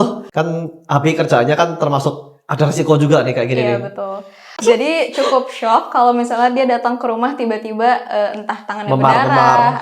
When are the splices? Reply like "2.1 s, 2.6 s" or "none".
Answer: 4.6 s